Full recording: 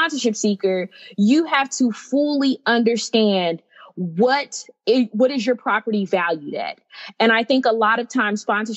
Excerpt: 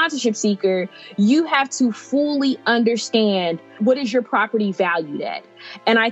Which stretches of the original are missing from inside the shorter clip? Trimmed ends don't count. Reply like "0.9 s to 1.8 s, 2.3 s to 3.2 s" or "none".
3.8 s to 5.1 s